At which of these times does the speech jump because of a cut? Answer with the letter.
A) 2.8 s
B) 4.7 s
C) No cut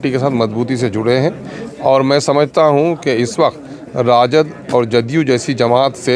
C